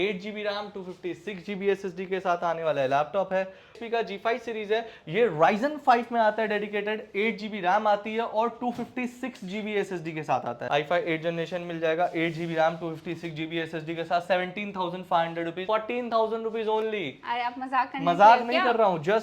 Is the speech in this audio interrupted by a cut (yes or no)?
yes